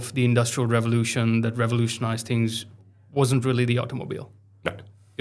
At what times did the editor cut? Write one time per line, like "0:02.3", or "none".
none

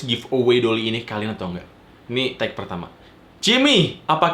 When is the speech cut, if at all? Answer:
none

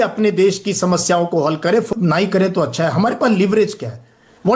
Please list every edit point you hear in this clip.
0:01.9

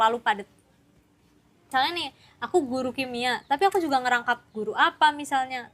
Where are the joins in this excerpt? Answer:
0:01.7

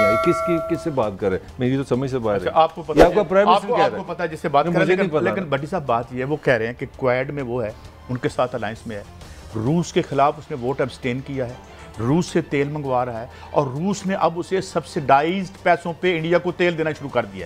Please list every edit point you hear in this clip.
none

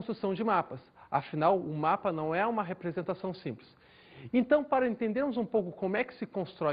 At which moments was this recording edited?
0:03.2

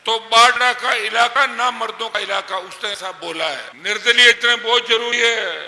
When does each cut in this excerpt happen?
0:03.7

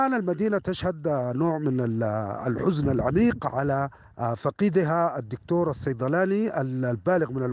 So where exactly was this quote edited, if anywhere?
none

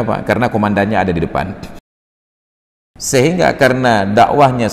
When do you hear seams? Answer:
0:02.3

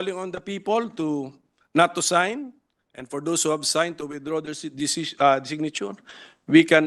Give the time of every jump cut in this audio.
none

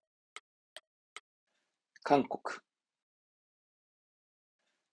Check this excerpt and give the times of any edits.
0:01.3

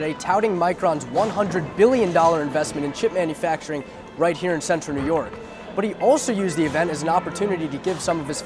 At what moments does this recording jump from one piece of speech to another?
none

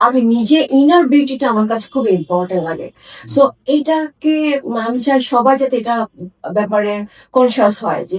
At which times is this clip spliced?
none

